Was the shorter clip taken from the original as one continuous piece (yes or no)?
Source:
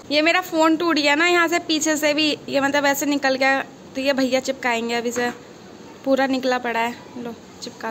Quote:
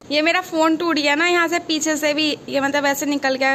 yes